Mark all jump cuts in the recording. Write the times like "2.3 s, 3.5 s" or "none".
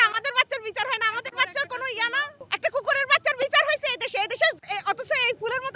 none